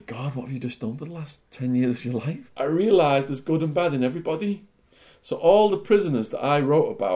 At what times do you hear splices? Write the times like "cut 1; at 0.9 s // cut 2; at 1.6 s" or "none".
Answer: cut 1; at 2.5 s